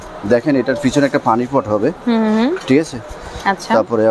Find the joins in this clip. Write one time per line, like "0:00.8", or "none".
none